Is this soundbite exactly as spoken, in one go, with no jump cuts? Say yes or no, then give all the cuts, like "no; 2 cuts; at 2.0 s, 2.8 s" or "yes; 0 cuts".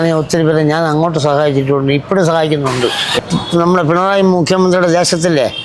no; 1 cut; at 3.2 s